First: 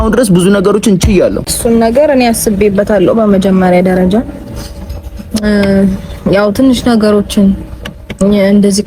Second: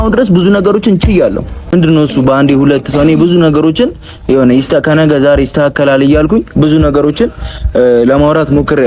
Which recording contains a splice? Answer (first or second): first